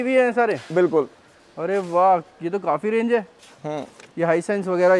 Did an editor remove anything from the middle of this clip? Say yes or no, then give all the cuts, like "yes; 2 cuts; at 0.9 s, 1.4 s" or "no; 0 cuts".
no; 0 cuts